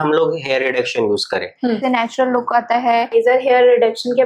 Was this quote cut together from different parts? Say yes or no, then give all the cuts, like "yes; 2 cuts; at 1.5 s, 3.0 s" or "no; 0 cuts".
yes; 2 cuts; at 1.8 s, 3.1 s